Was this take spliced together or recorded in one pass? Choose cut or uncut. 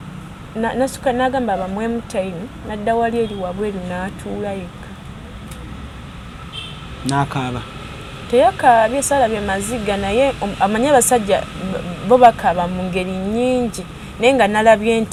uncut